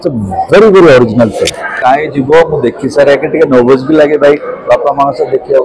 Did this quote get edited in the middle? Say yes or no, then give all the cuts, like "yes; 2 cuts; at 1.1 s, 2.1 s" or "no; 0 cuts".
yes; 1 cut; at 1.8 s